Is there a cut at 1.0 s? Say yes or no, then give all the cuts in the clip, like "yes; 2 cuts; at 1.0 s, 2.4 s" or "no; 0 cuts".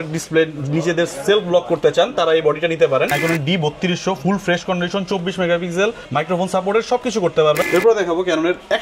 no; 2 cuts; at 3.1 s, 7.6 s